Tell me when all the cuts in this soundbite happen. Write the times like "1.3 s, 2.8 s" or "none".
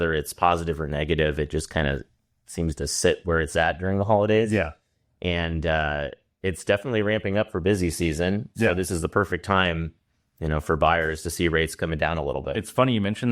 none